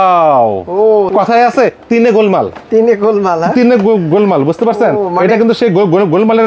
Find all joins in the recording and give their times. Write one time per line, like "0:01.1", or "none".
0:01.1